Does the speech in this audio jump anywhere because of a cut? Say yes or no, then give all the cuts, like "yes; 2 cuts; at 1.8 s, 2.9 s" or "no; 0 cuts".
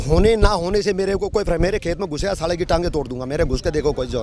no; 0 cuts